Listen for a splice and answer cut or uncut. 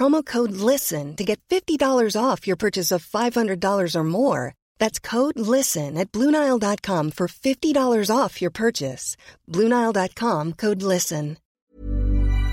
cut